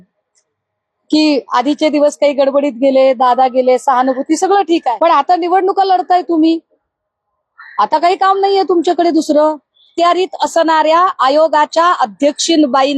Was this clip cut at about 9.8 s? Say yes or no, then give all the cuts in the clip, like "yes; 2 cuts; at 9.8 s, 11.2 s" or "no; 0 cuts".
yes; 2 cuts; at 4.9 s, 9.8 s